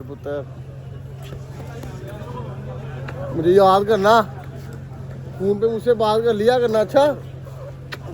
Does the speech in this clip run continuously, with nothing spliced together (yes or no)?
yes